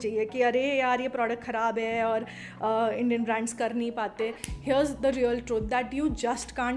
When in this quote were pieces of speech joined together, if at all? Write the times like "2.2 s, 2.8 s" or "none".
none